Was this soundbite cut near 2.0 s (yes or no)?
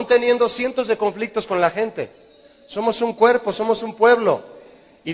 yes